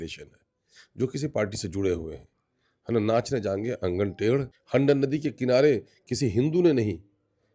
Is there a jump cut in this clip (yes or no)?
yes